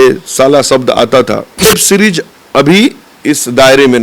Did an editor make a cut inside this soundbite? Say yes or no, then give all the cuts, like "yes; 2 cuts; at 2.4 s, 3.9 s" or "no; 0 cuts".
yes; 1 cut; at 1.7 s